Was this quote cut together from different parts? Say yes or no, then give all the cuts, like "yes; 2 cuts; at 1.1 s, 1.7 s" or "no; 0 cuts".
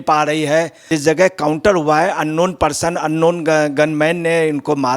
yes; 1 cut; at 0.9 s